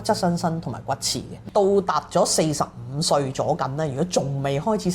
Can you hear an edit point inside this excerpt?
yes; 1 cut; at 1.4 s

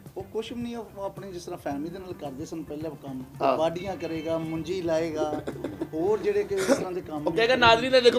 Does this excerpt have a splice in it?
no; 0 cuts

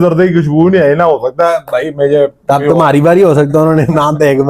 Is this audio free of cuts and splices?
yes; 0 cuts

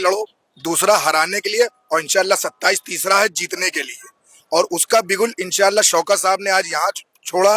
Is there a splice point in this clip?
no; 0 cuts

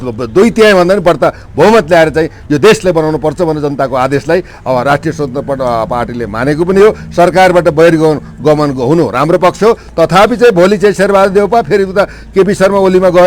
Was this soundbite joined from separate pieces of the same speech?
no; 0 cuts

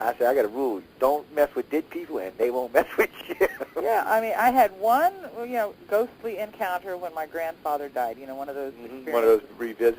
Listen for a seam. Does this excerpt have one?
yes; 1 cut; at 6.7 s

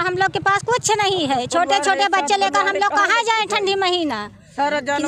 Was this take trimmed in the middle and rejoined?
no; 0 cuts

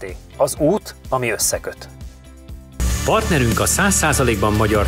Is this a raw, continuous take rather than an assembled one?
no; 1 cut; at 2.7 s

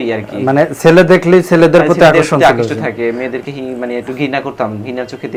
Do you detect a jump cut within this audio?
no; 0 cuts

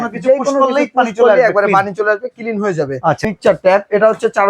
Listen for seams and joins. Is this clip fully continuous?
no; 1 cut; at 3.2 s

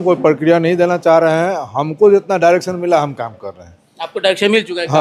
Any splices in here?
no; 0 cuts

